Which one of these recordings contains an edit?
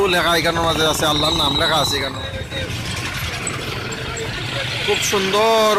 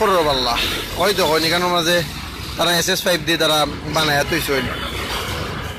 first; 1 cut; at 2.1 s

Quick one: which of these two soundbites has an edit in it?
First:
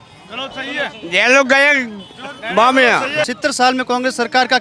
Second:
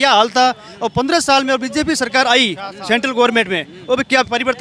first; 1 cut; at 3.3 s

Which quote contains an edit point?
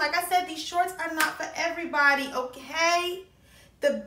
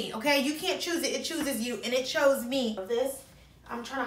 second; 1 cut; at 2.8 s

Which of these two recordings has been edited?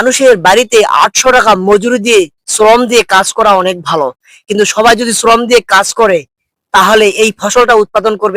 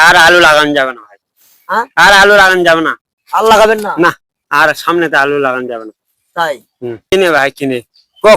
second; 1 cut; at 7.1 s

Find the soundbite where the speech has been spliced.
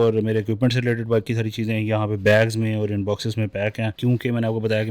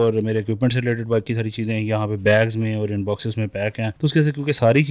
second; 1 cut; at 3.9 s

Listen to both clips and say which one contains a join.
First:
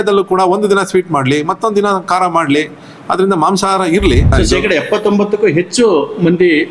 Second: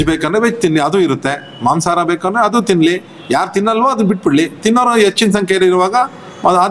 first; 1 cut; at 4.3 s

